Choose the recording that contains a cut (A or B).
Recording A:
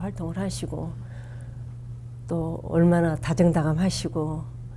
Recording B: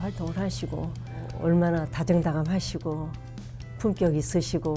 B